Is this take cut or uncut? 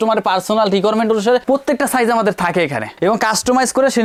uncut